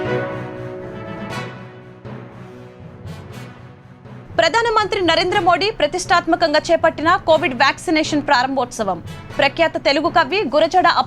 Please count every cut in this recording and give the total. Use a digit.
0